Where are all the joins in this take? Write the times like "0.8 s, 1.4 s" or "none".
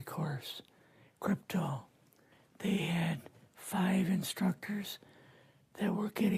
3.3 s